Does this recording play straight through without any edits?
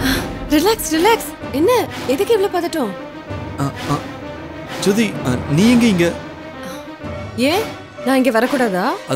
yes; 0 cuts

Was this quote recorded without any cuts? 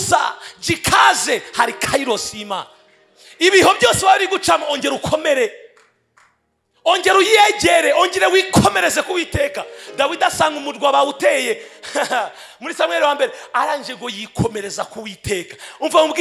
yes; 0 cuts

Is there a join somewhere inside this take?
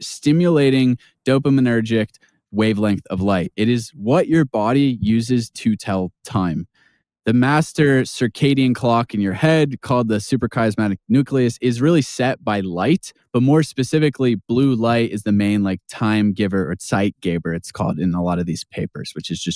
no; 0 cuts

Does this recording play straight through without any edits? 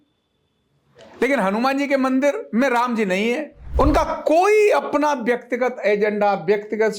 no; 1 cut; at 3.6 s

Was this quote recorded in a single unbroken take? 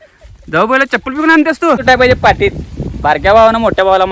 no; 1 cut; at 1.8 s

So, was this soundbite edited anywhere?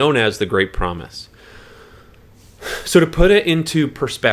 no; 0 cuts

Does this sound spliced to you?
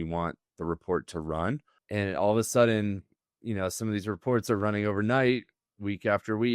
yes; 1 cut; at 1.7 s

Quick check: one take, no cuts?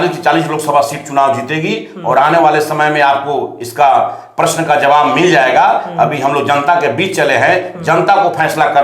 yes; 0 cuts

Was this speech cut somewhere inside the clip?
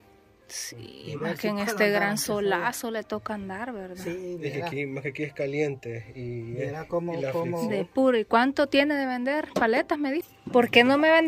yes; 1 cut; at 10.4 s

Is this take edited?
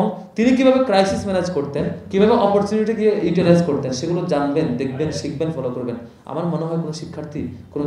no; 0 cuts

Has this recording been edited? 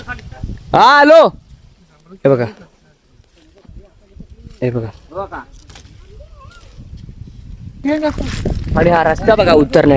yes; 1 cut; at 7.8 s

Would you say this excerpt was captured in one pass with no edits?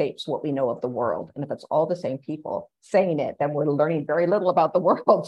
no; 1 cut; at 2.7 s

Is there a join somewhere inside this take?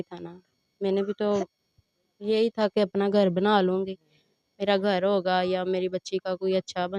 no; 0 cuts

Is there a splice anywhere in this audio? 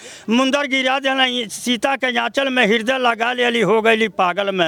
no; 0 cuts

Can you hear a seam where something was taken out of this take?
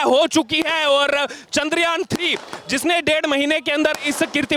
no; 0 cuts

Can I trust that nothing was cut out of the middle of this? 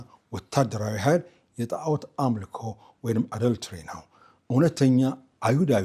yes; 0 cuts

